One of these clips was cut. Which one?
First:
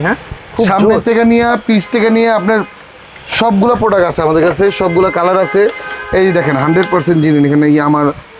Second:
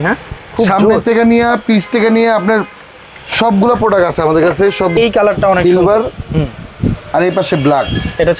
second; 1 cut; at 4.9 s

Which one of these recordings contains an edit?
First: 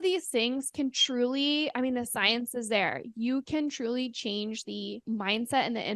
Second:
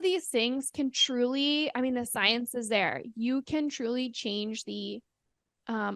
first; 1 cut; at 5.0 s

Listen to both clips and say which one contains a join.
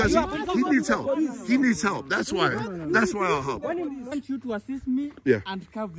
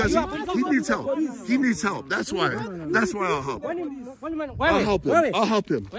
first; 1 cut; at 4.2 s

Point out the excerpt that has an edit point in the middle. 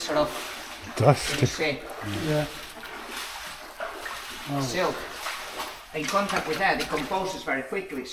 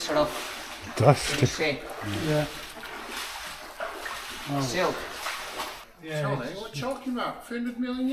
second; 1 cut; at 5.8 s

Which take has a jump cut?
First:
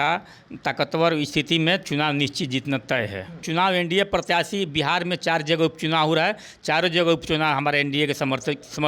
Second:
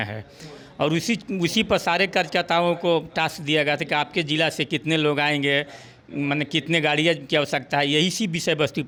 first; 1 cut; at 3.4 s

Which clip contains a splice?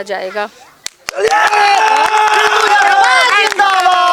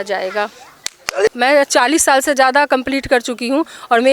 second; 1 cut; at 1.3 s

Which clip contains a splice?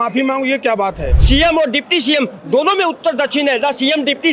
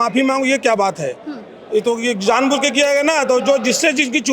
first; 1 cut; at 1.1 s

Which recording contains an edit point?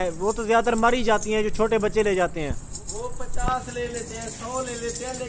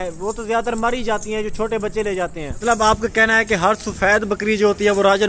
second; 1 cut; at 2.6 s

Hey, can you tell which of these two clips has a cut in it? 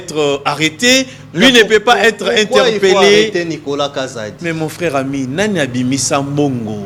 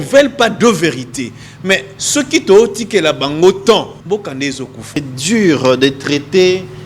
second; 2 cuts; at 4.0 s, 5.1 s

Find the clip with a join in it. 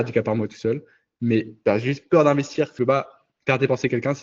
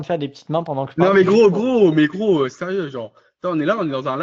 first; 2 cuts; at 1.5 s, 2.7 s

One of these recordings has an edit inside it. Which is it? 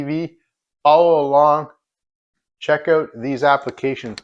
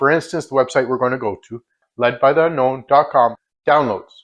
second; 2 cuts; at 1.8 s, 3.4 s

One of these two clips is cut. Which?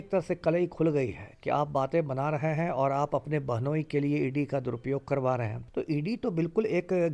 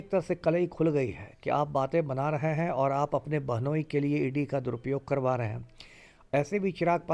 first; 1 cut; at 5.6 s

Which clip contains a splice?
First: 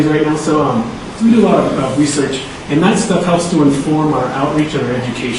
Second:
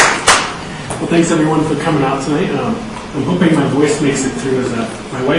first; 1 cut; at 1.2 s

